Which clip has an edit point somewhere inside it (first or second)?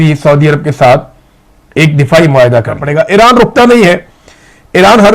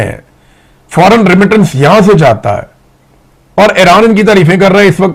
first